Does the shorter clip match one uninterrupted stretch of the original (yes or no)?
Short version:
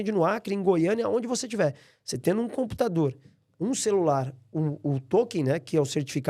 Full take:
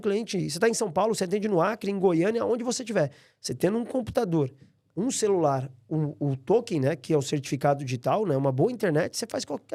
yes